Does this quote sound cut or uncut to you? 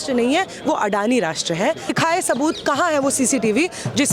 cut